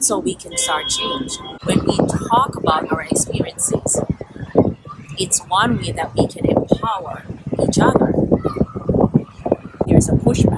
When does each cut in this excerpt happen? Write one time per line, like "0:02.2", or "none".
0:01.6
0:09.9